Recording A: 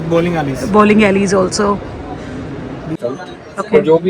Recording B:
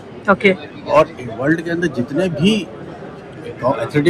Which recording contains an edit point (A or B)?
A